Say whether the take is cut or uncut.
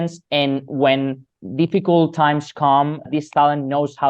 cut